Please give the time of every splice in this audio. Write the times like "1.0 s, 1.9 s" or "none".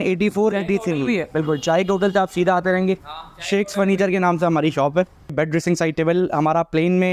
5.3 s